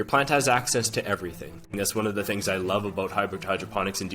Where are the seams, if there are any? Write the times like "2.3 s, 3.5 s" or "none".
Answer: 1.7 s